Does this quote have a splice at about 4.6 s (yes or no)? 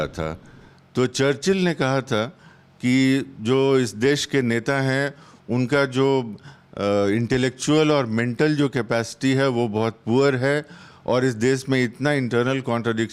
no